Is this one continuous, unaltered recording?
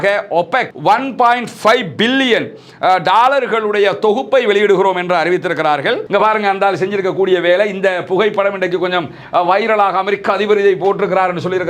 no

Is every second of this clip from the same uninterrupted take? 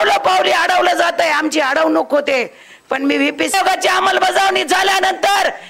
no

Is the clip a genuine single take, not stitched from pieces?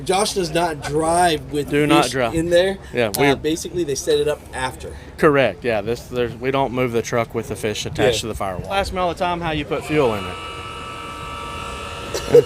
no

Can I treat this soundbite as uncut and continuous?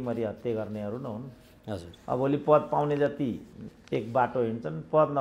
yes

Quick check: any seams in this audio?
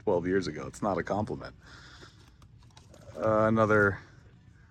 no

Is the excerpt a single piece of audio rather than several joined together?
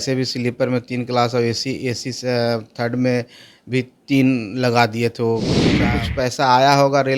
no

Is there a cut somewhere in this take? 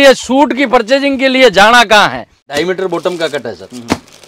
yes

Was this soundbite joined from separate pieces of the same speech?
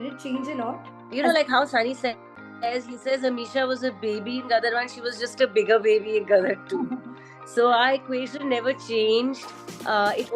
no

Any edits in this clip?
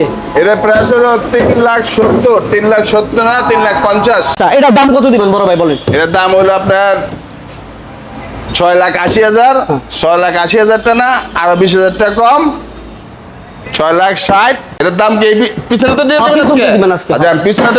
yes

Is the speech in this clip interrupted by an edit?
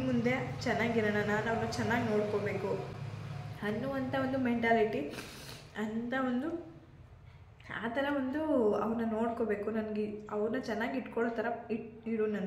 no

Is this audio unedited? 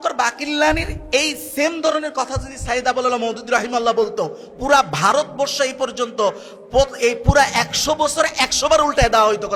yes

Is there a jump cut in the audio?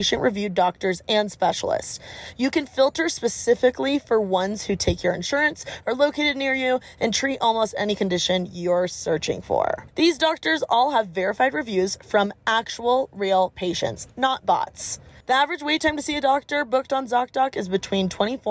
no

